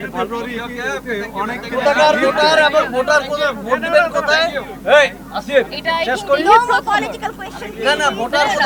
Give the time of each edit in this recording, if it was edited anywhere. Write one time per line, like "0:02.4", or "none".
none